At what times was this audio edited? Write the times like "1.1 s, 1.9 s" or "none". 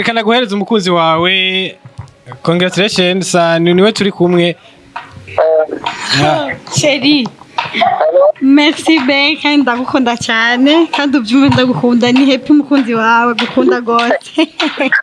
none

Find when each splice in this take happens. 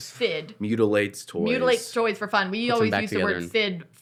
none

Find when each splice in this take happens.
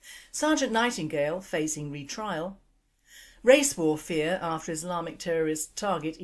none

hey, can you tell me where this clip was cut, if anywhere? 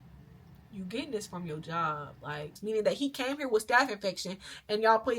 2.5 s

